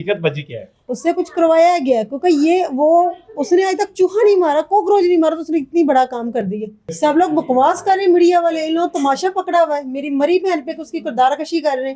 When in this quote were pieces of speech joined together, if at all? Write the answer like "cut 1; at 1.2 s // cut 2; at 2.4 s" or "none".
cut 1; at 0.9 s // cut 2; at 6.8 s